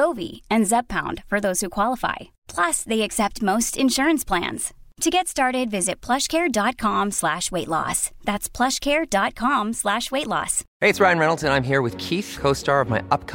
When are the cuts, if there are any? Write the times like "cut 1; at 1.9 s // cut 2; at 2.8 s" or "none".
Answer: cut 1; at 10.6 s